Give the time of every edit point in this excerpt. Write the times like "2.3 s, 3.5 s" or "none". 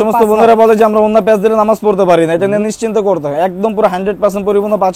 none